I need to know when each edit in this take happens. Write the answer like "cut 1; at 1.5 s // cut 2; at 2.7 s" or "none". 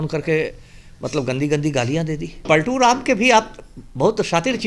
cut 1; at 2.4 s